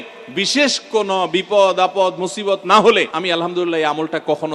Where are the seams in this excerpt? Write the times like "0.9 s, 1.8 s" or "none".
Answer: 3.1 s

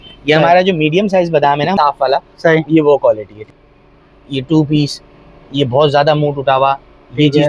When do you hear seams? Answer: 1.7 s, 3.4 s

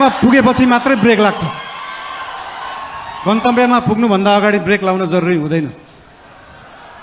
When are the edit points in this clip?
none

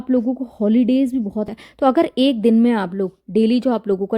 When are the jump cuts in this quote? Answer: 1.5 s

